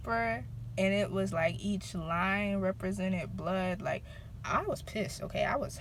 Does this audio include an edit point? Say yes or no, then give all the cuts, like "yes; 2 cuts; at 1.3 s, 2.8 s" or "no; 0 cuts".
no; 0 cuts